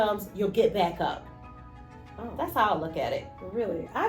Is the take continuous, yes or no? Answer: no